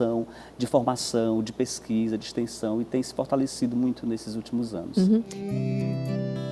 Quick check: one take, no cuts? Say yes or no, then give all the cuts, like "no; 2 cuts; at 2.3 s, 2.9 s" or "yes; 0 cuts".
no; 1 cut; at 5.4 s